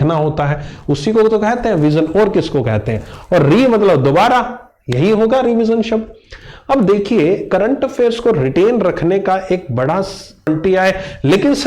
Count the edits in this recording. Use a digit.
1